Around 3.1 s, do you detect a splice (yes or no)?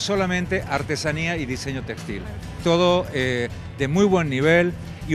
no